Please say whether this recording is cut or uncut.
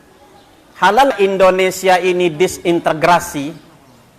cut